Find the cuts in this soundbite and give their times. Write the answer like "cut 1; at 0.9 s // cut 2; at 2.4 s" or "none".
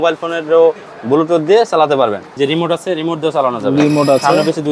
cut 1; at 2.4 s

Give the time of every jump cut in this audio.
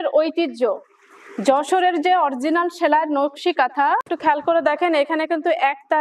cut 1; at 4.1 s

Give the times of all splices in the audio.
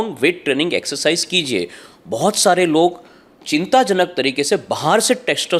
none

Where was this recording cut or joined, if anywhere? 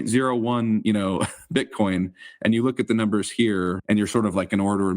cut 1; at 3.8 s

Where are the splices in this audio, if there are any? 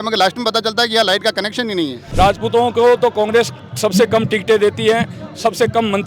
cut 1; at 2.0 s

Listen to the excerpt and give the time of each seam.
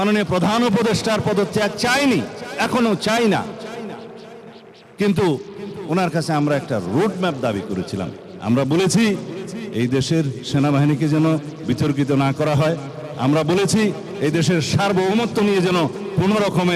cut 1; at 8.2 s

